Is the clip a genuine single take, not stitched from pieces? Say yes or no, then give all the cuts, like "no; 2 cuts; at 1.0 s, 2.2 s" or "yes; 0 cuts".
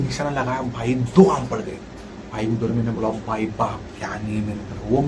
yes; 0 cuts